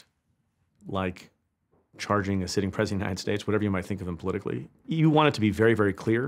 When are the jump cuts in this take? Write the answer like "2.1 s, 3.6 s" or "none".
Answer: 4.7 s